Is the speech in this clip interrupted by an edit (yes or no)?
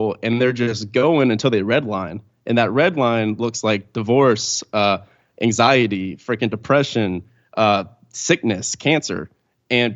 no